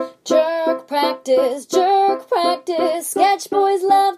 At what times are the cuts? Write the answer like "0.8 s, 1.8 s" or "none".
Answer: none